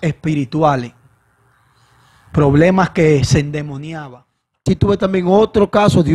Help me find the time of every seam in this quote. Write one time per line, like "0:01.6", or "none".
0:04.6